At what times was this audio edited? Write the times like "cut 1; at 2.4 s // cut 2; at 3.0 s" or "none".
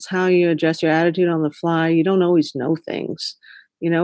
none